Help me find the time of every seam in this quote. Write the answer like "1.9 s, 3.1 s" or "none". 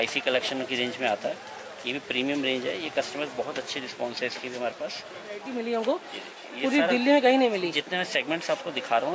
5.4 s